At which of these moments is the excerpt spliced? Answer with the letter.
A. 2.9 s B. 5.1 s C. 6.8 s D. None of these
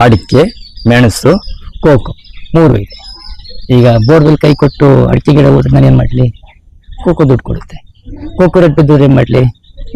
D